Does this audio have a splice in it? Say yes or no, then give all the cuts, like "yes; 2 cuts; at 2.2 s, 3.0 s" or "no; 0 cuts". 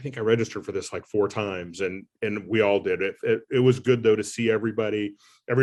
no; 0 cuts